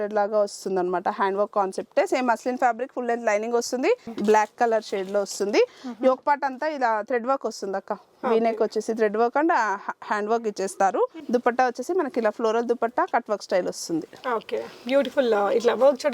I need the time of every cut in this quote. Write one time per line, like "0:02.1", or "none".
0:04.1
0:11.2